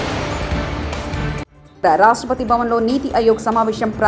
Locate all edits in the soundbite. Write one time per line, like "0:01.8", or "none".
0:01.6